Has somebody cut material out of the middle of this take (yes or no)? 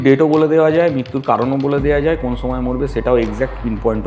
no